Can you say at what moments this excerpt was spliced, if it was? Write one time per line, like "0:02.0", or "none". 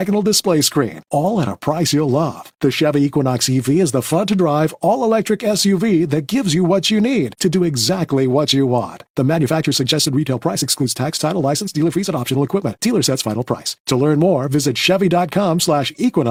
none